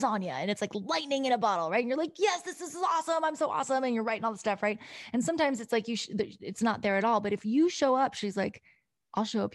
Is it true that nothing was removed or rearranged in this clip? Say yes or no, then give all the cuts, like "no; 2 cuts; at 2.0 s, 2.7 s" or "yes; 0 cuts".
yes; 0 cuts